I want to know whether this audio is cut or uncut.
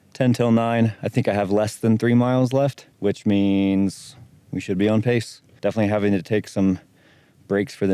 uncut